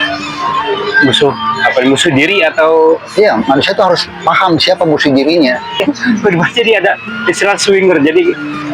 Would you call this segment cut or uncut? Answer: cut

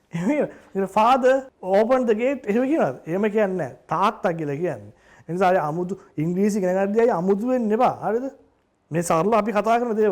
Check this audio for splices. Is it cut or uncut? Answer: cut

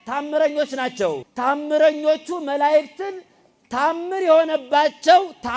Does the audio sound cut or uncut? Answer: cut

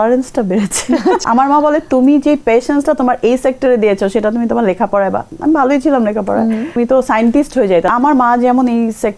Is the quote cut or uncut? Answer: cut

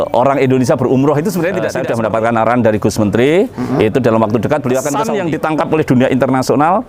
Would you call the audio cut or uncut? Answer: cut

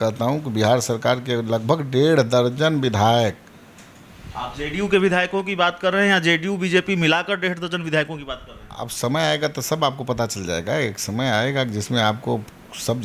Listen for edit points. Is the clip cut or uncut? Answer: uncut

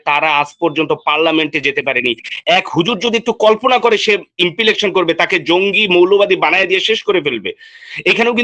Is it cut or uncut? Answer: uncut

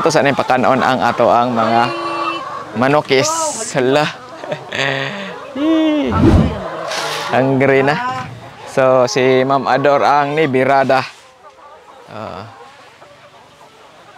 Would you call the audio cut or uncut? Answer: uncut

